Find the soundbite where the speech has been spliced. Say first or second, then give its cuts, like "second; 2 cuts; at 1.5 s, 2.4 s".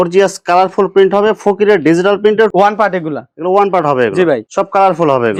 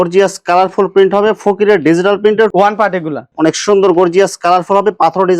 second; 1 cut; at 3.3 s